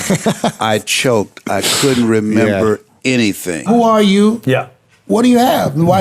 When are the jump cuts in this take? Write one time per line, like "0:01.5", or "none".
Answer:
0:03.7